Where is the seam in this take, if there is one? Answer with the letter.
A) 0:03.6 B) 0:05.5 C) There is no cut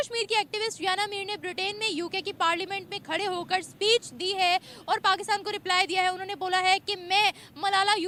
C